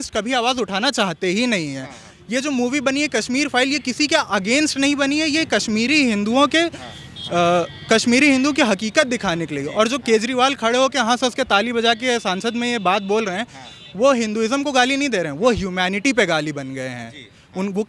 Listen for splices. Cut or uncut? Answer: uncut